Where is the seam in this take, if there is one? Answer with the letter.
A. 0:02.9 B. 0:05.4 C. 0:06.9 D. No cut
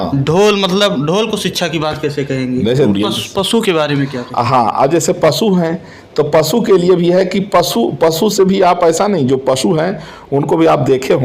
A